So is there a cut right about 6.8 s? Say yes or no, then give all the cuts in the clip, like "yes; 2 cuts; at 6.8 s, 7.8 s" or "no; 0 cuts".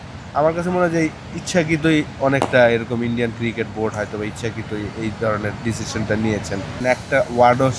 yes; 1 cut; at 6.8 s